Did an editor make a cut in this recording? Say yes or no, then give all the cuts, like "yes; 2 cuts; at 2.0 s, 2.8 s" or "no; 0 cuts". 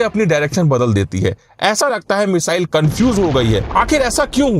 yes; 1 cut; at 3.6 s